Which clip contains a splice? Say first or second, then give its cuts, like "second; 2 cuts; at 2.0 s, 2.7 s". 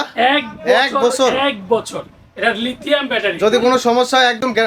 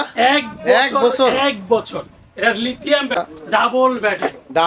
second; 1 cut; at 3.2 s